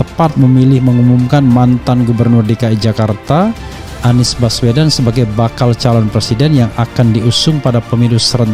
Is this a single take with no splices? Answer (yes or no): yes